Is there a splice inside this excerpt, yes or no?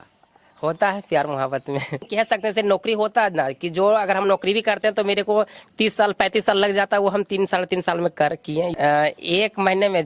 yes